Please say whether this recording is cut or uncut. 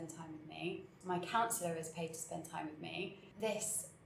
cut